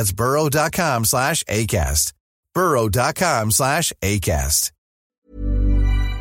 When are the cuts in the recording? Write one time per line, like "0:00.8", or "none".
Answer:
0:05.0